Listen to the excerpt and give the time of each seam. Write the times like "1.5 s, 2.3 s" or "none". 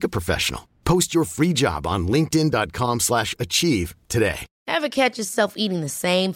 4.5 s